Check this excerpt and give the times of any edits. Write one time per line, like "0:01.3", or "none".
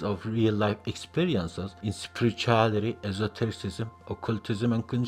none